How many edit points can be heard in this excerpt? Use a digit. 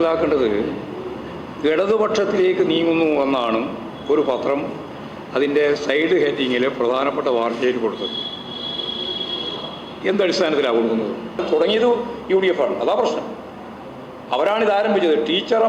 1